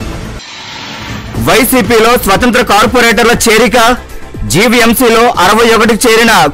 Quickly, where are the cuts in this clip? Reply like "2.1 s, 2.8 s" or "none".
1.0 s